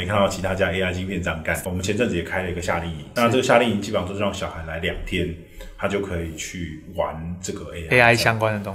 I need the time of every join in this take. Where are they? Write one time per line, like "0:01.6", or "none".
0:01.6